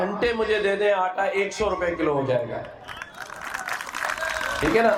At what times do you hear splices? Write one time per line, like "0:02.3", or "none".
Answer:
none